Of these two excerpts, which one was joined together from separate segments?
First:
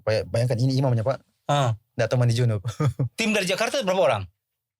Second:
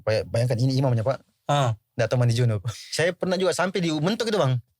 second; 1 cut; at 2.7 s

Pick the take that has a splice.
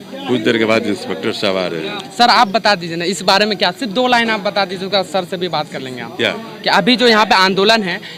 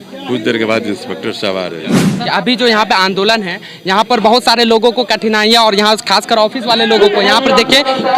second; 1 cut; at 2.1 s

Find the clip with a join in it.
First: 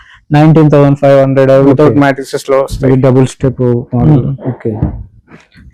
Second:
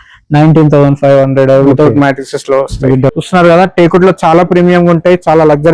second; 1 cut; at 3.1 s

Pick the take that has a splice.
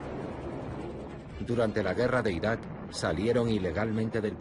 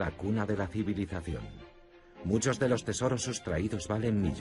second; 1 cut; at 1.6 s

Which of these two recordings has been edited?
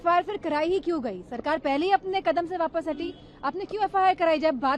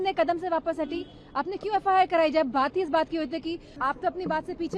second; 1 cut; at 3.7 s

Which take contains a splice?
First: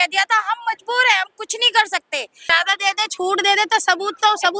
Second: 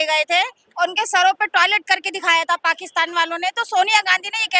first; 1 cut; at 2.5 s

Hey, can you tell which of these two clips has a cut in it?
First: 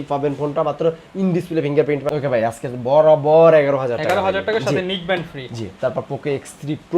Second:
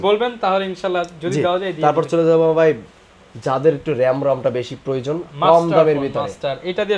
first; 1 cut; at 2.0 s

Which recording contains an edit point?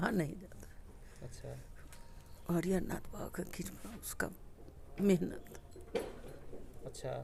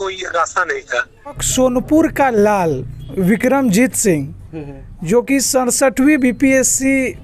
second; 1 cut; at 1.4 s

